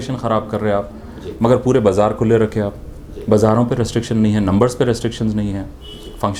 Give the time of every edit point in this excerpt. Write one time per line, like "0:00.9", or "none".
none